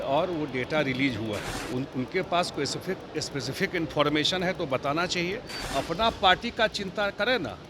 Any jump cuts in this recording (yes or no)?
yes